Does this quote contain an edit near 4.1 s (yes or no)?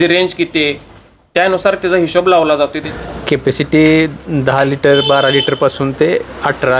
no